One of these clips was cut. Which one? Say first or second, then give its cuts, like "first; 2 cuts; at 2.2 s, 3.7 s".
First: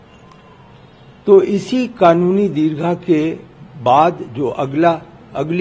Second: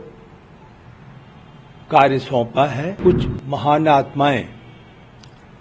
second; 1 cut; at 3.0 s